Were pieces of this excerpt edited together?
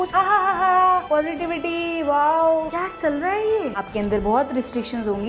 yes; 2 cuts; at 2.7 s, 3.7 s

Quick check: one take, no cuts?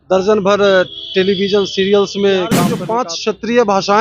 no; 1 cut; at 2.7 s

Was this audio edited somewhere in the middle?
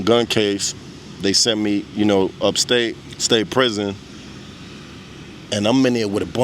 yes; 1 cut; at 3.1 s

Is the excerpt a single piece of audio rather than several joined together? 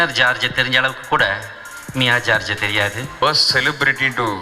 no; 1 cut; at 3.2 s

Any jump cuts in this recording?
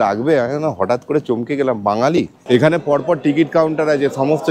yes; 1 cut; at 2.4 s

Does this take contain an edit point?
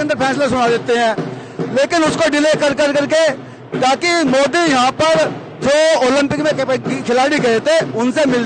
no; 0 cuts

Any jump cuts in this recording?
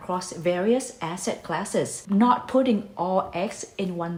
no; 0 cuts

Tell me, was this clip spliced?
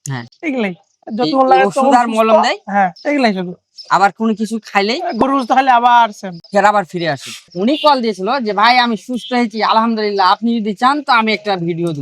yes; 1 cut; at 7.4 s

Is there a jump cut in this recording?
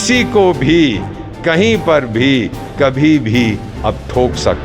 no; 0 cuts

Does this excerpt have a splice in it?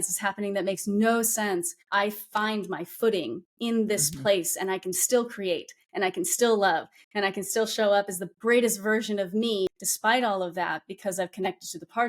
yes; 2 cuts; at 1.8 s, 9.7 s

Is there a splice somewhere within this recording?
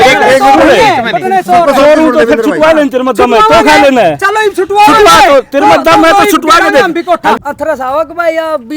yes; 1 cut; at 7.4 s

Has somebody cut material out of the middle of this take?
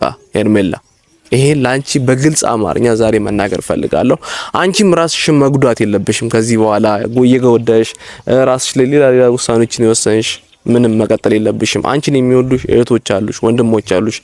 no; 0 cuts

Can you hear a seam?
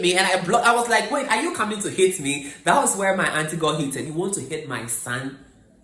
yes; 1 cut; at 4.1 s

